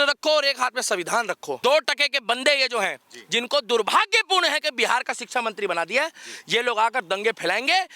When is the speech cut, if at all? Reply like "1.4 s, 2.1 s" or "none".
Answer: 1.5 s